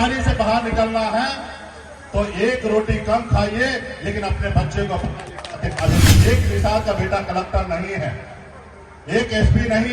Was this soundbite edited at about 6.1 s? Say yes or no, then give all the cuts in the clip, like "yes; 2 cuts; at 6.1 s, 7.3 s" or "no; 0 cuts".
yes; 1 cut; at 6.1 s